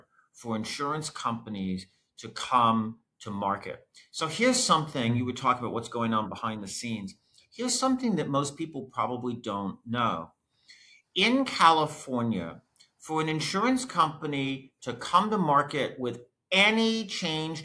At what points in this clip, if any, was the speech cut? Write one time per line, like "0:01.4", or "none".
none